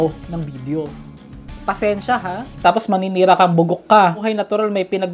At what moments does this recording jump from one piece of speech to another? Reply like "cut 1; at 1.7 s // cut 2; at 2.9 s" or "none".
cut 1; at 2.6 s // cut 2; at 4.2 s